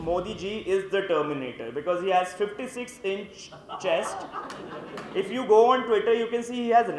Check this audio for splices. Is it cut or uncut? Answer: uncut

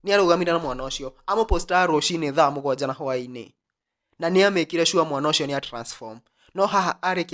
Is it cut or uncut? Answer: uncut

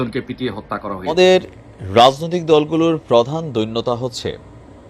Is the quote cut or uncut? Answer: cut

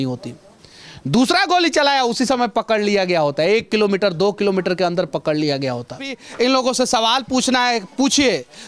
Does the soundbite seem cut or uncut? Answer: cut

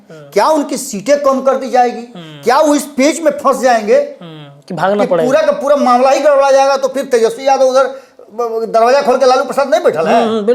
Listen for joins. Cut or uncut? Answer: uncut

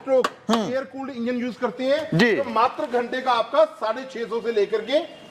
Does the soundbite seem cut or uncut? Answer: uncut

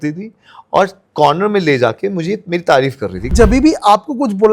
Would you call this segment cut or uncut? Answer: cut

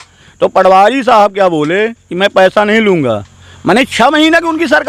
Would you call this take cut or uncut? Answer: uncut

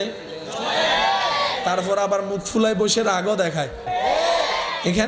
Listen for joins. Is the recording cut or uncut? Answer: cut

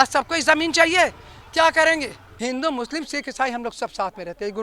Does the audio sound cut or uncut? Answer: cut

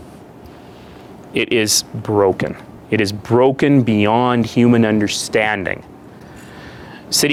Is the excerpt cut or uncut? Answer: uncut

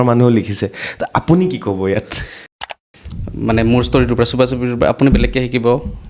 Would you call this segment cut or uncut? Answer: cut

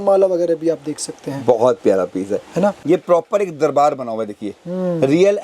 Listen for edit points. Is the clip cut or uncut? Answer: cut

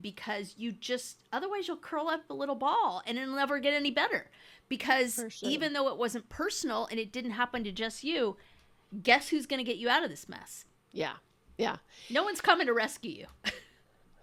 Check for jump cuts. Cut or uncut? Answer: uncut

